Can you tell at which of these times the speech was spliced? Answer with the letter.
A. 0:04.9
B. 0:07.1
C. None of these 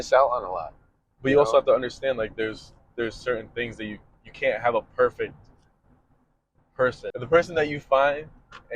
B